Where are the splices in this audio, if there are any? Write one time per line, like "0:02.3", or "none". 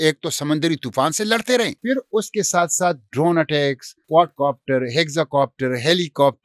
0:01.8
0:03.9